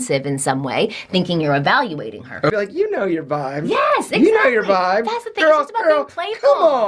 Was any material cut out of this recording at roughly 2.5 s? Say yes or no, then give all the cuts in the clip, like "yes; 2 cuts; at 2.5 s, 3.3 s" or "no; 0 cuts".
yes; 1 cut; at 2.5 s